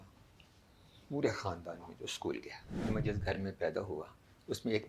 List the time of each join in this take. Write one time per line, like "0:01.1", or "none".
0:02.8